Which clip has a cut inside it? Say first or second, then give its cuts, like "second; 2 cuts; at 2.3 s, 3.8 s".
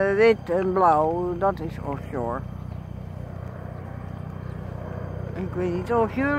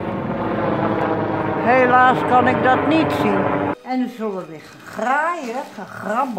second; 1 cut; at 3.7 s